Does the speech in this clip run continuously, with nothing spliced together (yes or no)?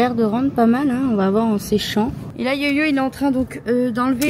no